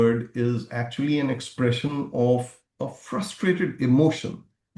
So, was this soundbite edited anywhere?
no; 0 cuts

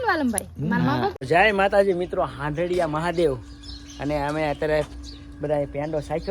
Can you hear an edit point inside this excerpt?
yes; 1 cut; at 1.2 s

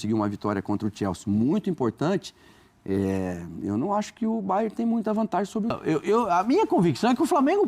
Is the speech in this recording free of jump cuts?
no; 1 cut; at 5.8 s

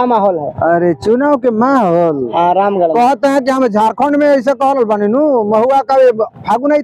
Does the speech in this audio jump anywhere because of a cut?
no; 0 cuts

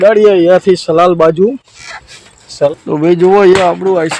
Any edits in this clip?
yes; 1 cut; at 2.7 s

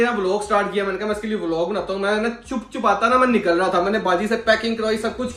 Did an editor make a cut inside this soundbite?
no; 0 cuts

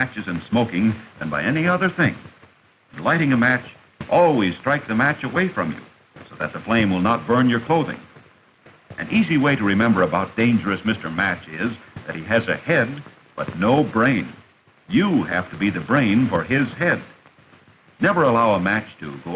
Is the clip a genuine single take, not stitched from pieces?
no; 1 cut; at 12.8 s

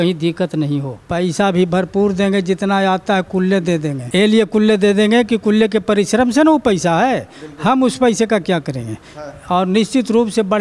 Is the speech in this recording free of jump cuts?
no; 2 cuts; at 1.0 s, 4.0 s

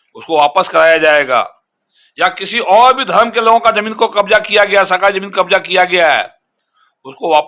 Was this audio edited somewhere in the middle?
no; 0 cuts

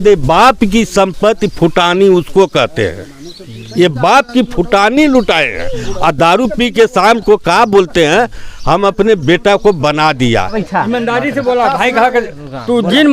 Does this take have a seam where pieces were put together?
yes; 1 cut; at 10.6 s

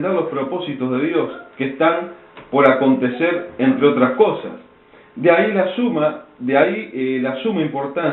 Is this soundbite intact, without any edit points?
no; 1 cut; at 1.9 s

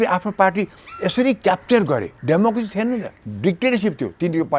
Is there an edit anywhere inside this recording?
yes; 1 cut; at 2.1 s

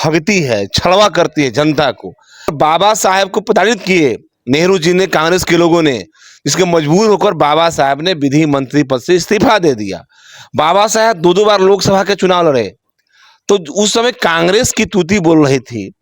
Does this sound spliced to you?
yes; 1 cut; at 2.5 s

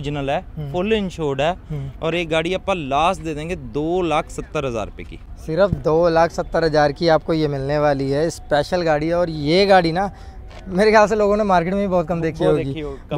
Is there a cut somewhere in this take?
no; 0 cuts

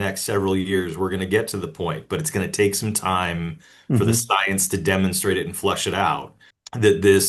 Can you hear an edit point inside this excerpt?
no; 0 cuts

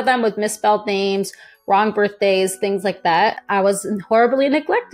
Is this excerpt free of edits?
no; 1 cut; at 3.4 s

